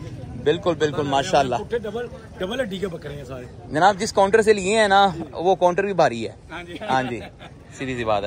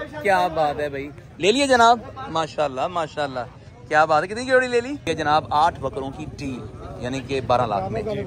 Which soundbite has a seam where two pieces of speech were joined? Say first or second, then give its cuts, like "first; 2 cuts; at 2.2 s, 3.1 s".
second; 1 cut; at 5.1 s